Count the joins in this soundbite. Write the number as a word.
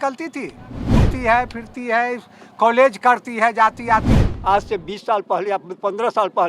two